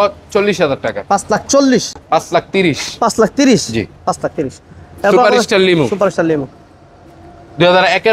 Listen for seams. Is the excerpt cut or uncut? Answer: uncut